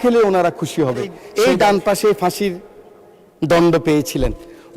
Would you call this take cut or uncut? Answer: cut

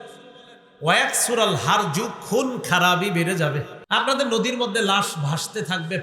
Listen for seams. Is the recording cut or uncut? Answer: cut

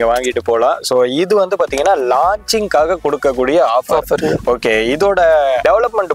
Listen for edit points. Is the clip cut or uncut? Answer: uncut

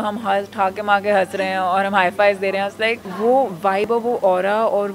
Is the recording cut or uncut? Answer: cut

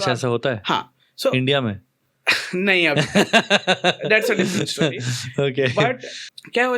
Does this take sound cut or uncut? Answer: uncut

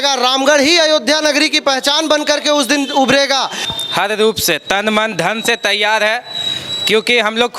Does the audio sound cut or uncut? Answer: cut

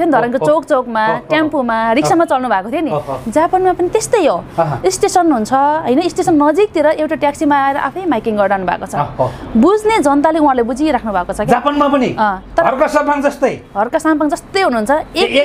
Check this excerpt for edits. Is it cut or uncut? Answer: uncut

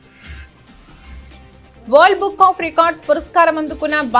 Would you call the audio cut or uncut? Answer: cut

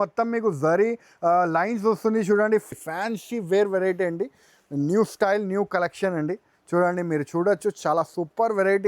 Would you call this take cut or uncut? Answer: cut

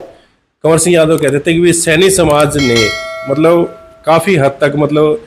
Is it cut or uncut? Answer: uncut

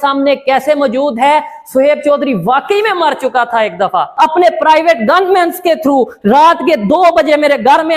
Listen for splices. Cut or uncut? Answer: cut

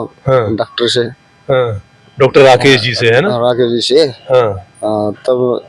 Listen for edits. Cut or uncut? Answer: uncut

